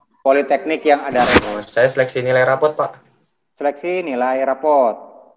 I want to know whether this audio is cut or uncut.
cut